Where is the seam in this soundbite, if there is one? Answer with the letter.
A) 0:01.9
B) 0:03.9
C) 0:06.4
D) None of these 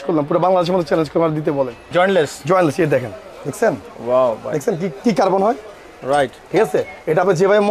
A